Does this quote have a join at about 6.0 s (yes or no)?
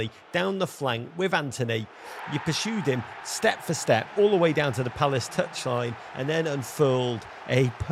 no